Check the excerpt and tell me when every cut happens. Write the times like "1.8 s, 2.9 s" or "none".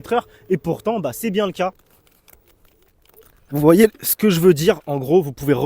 1.8 s